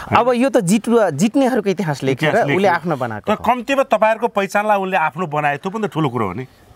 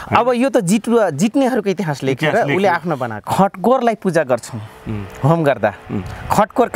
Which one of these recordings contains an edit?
second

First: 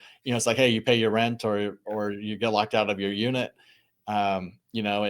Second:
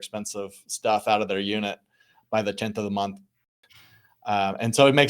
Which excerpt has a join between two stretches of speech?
second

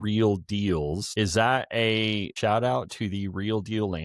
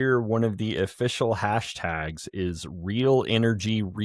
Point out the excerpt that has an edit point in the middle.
first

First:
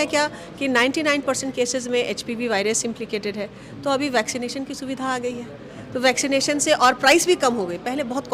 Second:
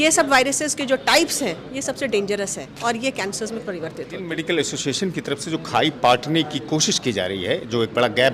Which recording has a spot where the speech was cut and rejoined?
second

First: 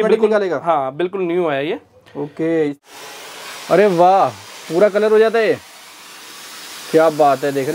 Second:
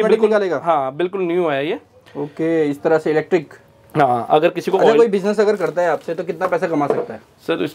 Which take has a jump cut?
first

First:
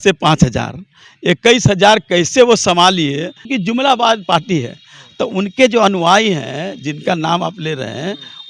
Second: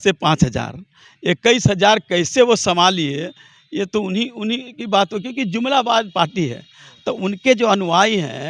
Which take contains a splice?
first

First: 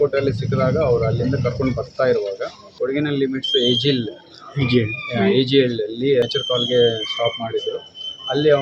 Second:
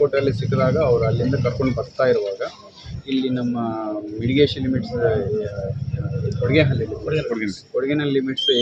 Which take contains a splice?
first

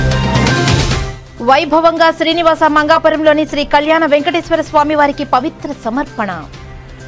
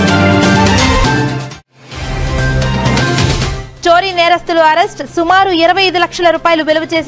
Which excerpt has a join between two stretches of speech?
first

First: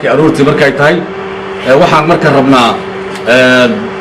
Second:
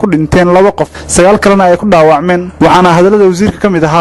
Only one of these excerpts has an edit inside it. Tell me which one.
first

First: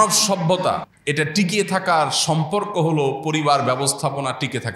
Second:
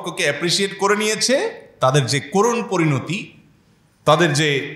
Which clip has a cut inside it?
first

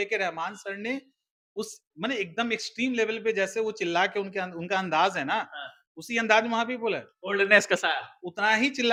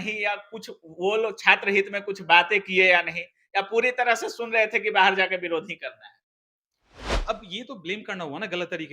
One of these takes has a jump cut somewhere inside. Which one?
second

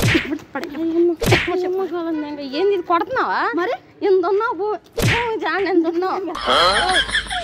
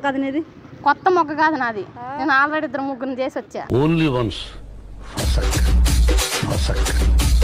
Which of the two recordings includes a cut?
second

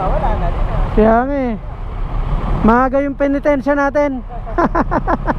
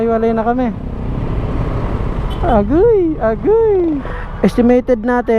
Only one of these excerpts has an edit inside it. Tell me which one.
second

